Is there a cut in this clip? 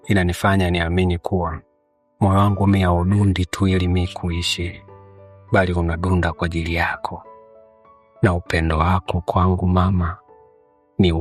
no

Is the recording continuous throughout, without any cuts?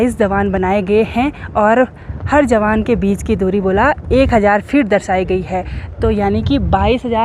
yes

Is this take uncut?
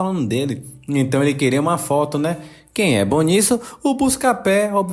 yes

